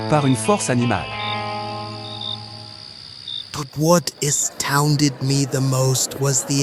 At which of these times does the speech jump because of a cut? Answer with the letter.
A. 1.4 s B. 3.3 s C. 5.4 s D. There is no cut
B